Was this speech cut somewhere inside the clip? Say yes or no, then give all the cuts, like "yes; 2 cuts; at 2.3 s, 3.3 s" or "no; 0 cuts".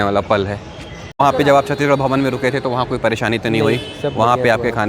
yes; 1 cut; at 1.2 s